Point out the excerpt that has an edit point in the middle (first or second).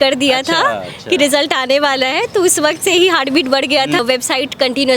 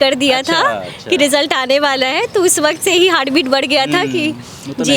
first